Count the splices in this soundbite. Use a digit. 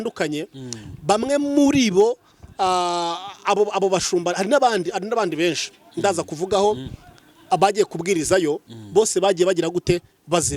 0